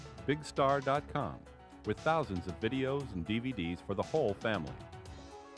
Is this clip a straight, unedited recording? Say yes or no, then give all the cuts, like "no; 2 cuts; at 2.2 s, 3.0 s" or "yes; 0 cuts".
no; 1 cut; at 4.7 s